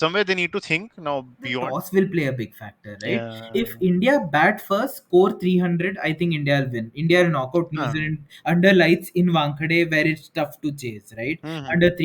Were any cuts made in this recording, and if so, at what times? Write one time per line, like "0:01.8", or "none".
0:01.6